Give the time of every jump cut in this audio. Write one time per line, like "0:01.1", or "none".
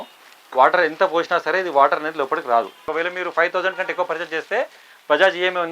0:02.8